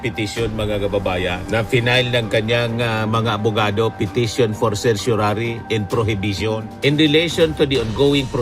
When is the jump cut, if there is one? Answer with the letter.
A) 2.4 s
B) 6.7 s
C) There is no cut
B